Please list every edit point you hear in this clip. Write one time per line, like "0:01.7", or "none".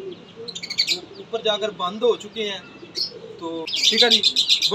0:03.8